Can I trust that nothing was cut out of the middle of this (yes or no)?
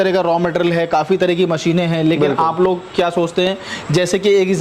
yes